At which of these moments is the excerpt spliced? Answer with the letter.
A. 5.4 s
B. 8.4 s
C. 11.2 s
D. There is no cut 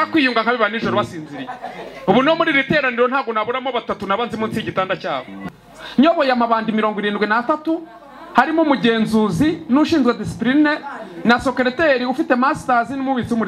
A